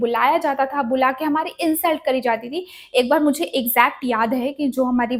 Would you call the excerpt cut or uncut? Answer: uncut